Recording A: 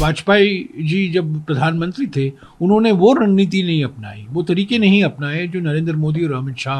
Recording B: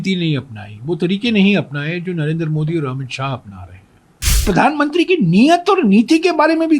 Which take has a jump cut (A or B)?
B